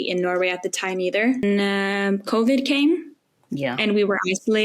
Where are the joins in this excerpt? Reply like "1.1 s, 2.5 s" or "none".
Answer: 1.4 s